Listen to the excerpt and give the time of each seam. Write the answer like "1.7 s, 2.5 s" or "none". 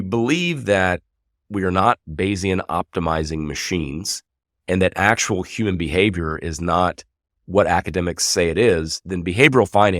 none